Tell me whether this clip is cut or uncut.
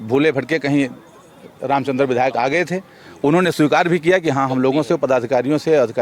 uncut